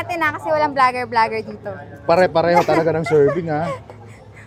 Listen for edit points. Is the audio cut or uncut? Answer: uncut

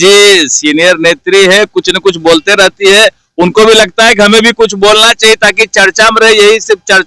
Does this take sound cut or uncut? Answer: uncut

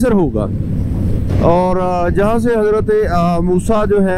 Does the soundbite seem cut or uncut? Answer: uncut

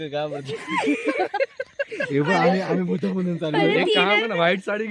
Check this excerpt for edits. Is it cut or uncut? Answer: uncut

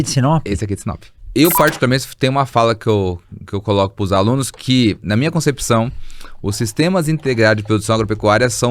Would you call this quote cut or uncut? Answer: cut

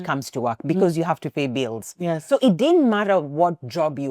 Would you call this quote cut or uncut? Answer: cut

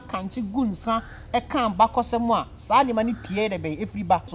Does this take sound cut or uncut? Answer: uncut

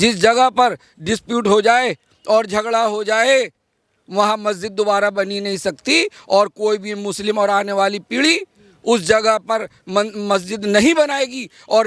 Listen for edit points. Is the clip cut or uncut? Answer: uncut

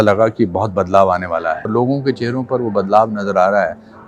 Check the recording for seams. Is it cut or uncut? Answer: cut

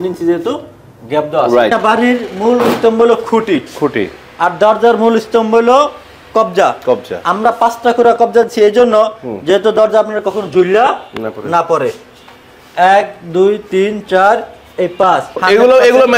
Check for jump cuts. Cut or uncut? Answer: cut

